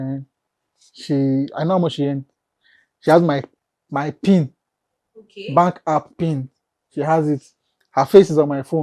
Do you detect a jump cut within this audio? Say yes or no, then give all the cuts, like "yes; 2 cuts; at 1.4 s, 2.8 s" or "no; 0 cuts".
no; 0 cuts